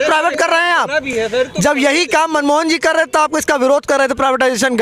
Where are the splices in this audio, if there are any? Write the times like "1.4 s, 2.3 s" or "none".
none